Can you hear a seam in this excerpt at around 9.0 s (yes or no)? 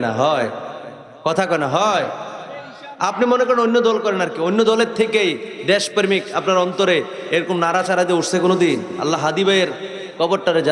yes